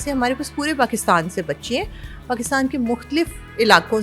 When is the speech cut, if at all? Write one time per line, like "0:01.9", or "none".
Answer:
none